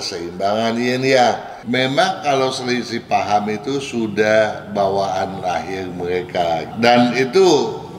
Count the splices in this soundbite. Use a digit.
2